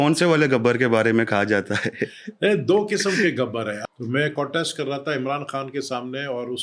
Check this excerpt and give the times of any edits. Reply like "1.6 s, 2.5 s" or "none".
3.8 s